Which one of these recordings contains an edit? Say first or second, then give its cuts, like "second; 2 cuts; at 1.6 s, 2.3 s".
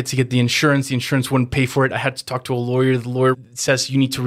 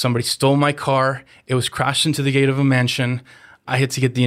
first; 1 cut; at 3.4 s